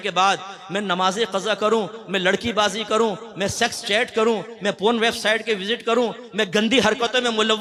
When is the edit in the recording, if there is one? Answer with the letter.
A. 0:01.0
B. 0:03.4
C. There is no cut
C